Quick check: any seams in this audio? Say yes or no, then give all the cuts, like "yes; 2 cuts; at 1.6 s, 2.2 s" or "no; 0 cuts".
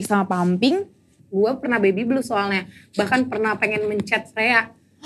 yes; 1 cut; at 1.1 s